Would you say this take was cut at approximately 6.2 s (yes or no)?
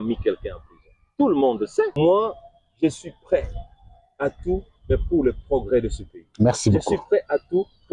no